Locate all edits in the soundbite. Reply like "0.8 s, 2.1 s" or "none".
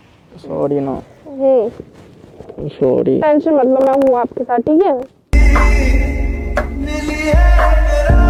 none

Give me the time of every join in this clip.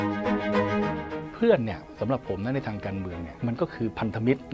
1.1 s, 3.2 s

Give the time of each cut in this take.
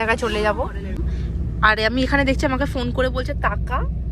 1.1 s

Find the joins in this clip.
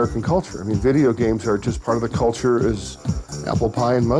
1.7 s

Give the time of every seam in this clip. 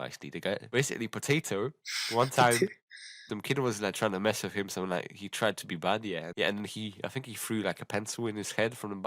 3.2 s, 6.3 s

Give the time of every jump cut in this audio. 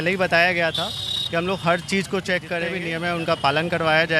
2.8 s

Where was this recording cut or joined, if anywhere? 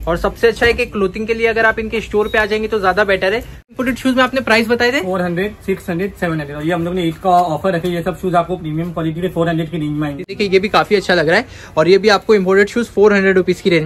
3.7 s, 10.3 s

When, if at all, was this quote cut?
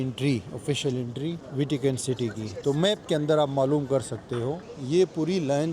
1.4 s, 4.6 s

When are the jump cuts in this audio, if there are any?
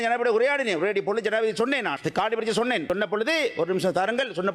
2.0 s, 2.8 s

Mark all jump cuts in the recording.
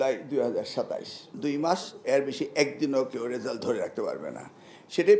1.3 s

